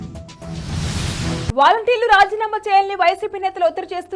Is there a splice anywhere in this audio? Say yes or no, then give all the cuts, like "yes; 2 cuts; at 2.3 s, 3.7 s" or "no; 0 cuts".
yes; 1 cut; at 1.4 s